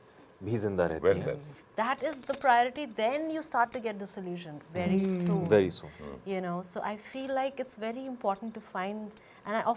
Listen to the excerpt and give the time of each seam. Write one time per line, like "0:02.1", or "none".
0:01.5

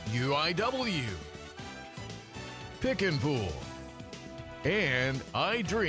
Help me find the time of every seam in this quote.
0:01.1

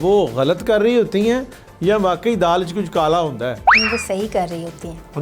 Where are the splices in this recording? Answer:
0:03.7

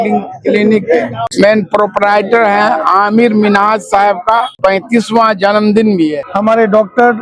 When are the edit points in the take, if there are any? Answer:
0:01.2
0:04.5
0:06.2

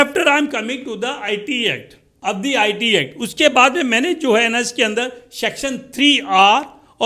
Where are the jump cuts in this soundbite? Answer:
0:02.1

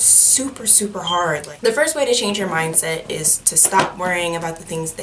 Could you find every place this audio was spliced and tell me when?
0:01.5

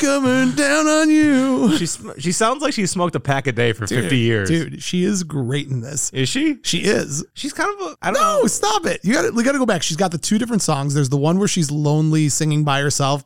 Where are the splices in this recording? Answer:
none

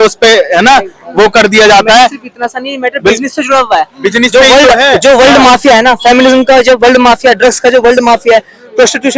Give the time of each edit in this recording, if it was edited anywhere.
none

